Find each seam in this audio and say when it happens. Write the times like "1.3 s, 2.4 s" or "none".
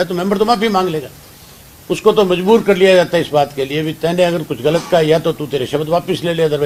none